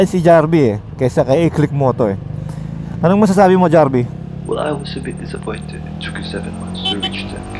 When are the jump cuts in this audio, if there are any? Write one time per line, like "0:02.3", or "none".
none

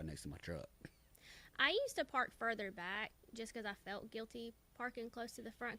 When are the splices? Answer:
none

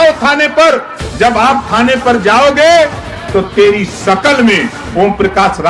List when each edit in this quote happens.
0:01.0

